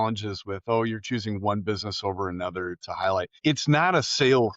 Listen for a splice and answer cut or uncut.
cut